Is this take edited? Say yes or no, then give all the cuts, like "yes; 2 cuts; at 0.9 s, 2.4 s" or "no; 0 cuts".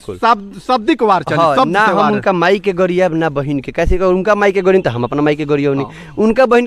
no; 0 cuts